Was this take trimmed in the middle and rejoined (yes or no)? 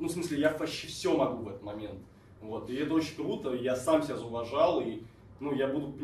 no